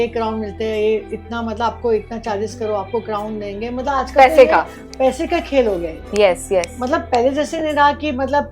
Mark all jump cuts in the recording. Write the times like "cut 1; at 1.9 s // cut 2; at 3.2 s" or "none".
none